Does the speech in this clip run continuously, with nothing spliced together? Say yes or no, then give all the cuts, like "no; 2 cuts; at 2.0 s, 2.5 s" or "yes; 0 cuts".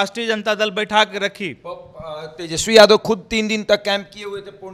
yes; 0 cuts